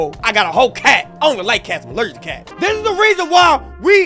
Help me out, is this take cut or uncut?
cut